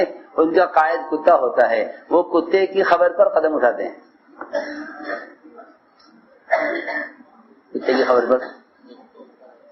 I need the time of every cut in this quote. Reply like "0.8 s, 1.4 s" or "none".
none